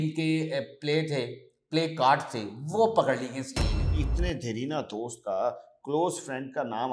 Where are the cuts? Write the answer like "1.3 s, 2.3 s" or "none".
3.9 s